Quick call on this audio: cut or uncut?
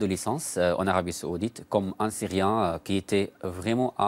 uncut